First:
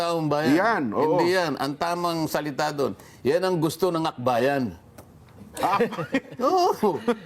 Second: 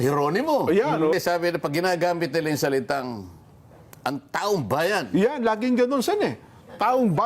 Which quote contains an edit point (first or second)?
second